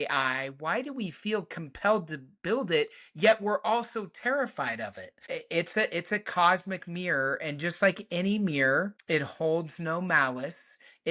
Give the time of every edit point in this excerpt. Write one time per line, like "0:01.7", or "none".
0:05.2
0:09.0